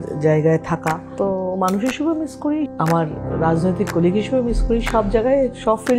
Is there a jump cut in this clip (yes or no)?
yes